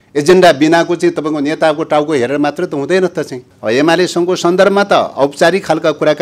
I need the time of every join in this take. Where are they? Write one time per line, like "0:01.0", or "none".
0:03.4